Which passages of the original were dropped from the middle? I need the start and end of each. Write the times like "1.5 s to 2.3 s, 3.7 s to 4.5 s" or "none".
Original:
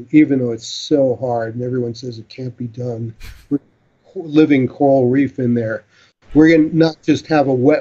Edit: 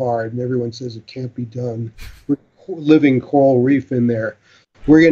3.8 s to 4.0 s